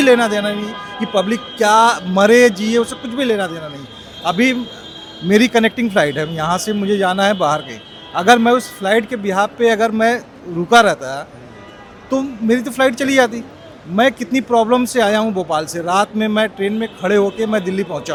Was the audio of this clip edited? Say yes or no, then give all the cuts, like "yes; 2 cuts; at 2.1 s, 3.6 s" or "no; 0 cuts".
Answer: no; 0 cuts